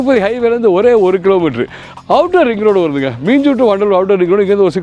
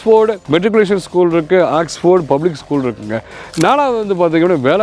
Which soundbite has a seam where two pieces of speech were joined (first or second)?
first